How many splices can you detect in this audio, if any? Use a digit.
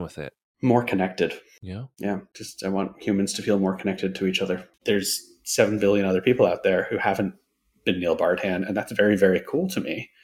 1